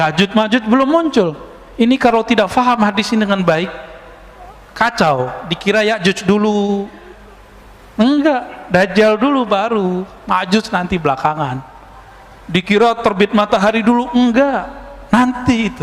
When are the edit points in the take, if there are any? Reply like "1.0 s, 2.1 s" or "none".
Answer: none